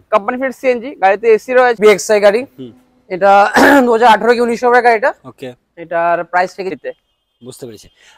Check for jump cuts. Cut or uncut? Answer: cut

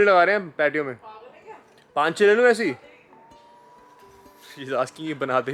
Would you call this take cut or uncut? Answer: uncut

